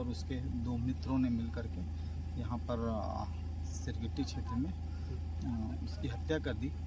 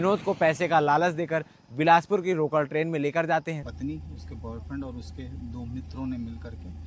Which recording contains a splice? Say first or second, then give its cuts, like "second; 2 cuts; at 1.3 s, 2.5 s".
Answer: second; 1 cut; at 3.7 s